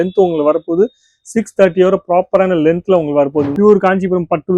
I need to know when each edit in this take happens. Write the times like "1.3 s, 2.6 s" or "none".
3.5 s